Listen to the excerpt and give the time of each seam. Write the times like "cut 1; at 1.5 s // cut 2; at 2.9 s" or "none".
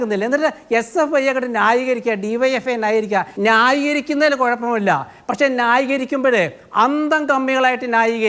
cut 1; at 3.3 s